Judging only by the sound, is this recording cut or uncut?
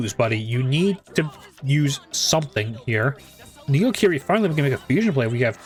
uncut